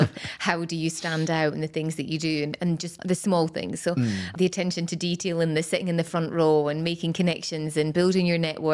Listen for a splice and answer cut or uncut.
cut